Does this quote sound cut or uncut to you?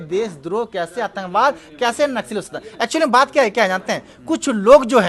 uncut